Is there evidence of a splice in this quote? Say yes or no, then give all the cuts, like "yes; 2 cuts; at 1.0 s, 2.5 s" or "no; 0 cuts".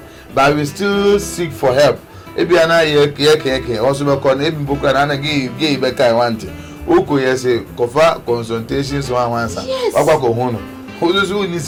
no; 0 cuts